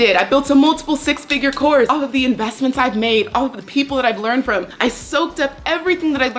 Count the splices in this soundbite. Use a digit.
2